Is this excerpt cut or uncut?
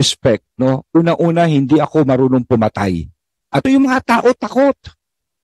cut